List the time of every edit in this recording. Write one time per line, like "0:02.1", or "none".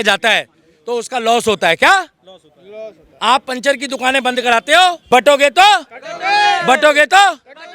0:05.0